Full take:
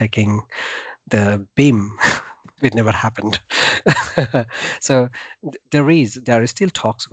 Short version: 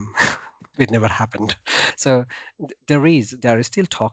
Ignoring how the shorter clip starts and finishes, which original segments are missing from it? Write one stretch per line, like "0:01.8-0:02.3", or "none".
0:03.8-0:04.8